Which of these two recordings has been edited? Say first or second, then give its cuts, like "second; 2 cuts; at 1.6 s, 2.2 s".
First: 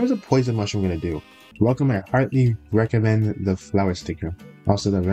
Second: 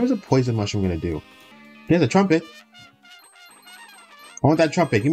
second; 1 cut; at 1.5 s